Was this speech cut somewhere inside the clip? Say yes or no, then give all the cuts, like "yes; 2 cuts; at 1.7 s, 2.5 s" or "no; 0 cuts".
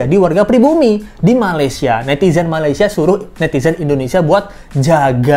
no; 0 cuts